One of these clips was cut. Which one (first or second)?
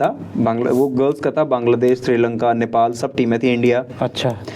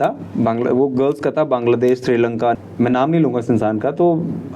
second